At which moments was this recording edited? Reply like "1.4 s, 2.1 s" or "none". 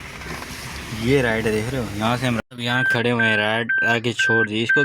2.4 s